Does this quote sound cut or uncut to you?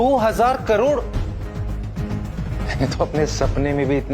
cut